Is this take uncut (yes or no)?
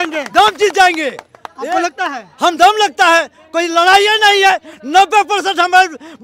yes